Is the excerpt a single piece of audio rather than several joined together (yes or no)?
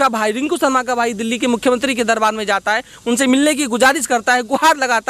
yes